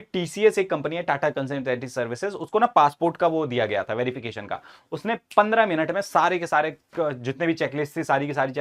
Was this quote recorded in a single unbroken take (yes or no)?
yes